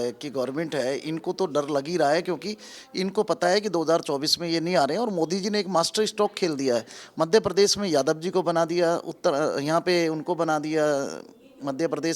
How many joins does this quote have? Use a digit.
0